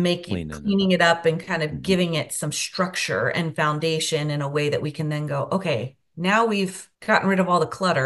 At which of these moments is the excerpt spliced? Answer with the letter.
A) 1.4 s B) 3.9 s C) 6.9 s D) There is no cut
C